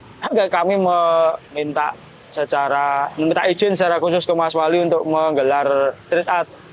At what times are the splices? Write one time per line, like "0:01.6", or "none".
none